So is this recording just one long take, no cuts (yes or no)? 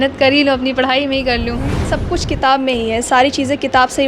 no